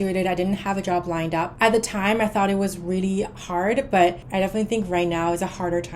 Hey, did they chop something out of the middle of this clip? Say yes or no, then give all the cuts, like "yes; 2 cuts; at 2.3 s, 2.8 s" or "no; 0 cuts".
no; 0 cuts